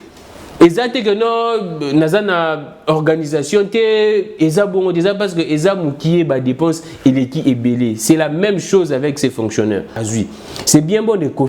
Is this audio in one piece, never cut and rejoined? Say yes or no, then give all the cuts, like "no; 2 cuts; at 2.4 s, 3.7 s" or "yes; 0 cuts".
no; 1 cut; at 10.1 s